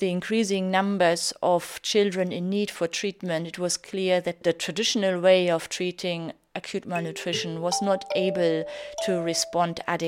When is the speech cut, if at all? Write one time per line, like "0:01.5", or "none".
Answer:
0:04.4

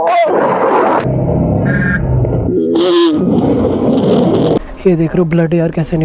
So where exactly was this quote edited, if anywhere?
0:01.0
0:04.7

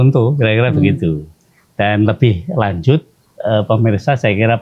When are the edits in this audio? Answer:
none

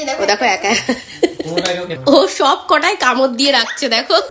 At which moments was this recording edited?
0:01.9

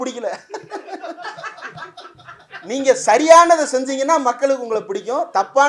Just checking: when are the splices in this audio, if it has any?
none

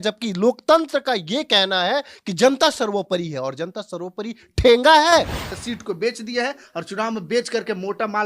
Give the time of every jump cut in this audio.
0:05.4

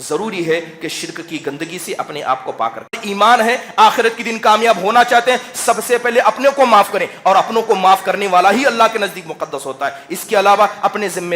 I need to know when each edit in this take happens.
0:03.0

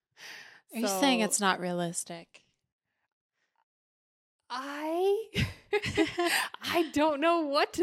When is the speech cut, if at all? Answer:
none

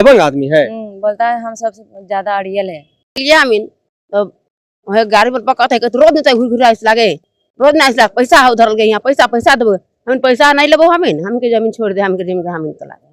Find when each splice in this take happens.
0:03.2

